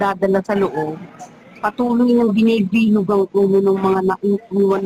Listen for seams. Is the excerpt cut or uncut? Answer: uncut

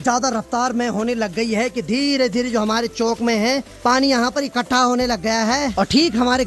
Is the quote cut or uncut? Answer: uncut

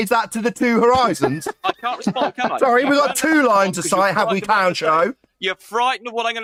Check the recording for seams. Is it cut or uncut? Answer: uncut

